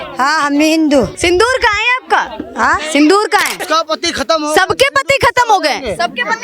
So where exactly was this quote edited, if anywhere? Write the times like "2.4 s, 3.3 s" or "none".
1.1 s, 3.5 s

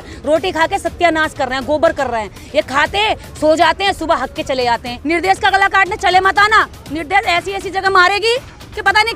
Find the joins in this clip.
4.9 s

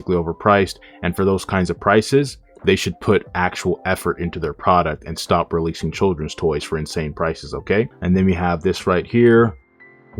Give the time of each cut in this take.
7.9 s

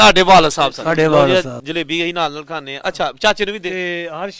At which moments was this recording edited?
1.3 s

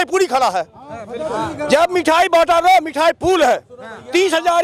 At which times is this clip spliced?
none

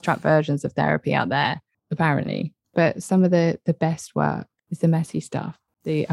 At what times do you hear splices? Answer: 2.7 s

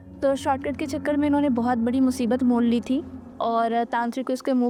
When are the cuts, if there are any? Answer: none

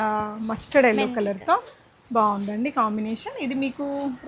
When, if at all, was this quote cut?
none

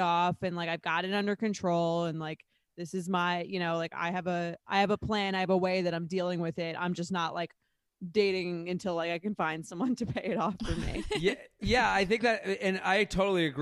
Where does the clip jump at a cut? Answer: none

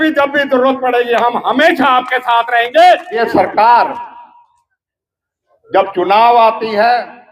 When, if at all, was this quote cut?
3.2 s

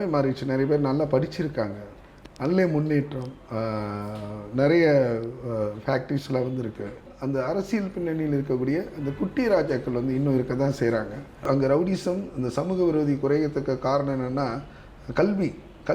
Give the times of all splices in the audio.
7.1 s, 11.4 s

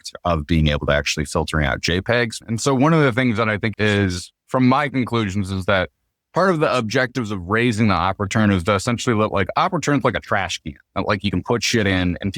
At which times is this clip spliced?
2.3 s, 3.7 s

